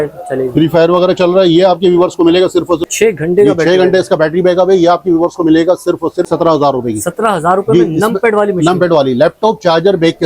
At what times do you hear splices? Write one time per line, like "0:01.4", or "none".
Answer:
0:02.9
0:06.3